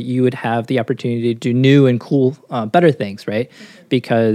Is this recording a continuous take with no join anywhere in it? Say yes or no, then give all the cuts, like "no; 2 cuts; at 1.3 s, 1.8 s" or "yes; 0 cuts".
no; 1 cut; at 1.4 s